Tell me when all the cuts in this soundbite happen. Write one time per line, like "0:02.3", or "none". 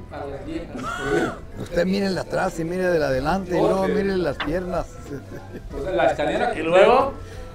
none